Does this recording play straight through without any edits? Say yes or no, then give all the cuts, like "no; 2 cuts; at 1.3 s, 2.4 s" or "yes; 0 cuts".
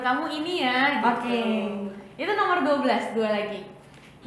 yes; 0 cuts